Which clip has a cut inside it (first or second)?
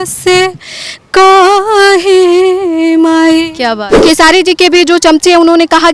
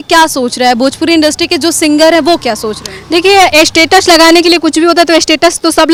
first